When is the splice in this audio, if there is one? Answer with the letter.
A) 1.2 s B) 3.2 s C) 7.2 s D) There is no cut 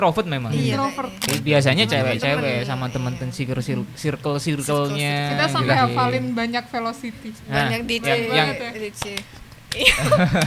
A